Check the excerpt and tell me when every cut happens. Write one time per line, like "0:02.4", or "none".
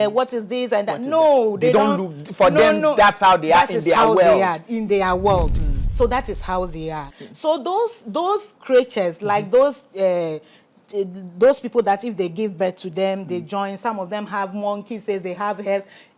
0:07.1